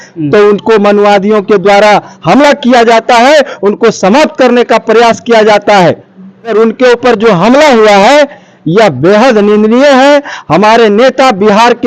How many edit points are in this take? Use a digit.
0